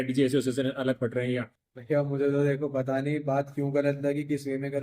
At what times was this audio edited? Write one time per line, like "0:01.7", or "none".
0:01.5